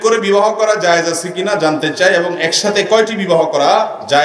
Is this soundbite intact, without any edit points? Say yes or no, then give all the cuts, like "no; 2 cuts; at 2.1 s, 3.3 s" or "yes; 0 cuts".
yes; 0 cuts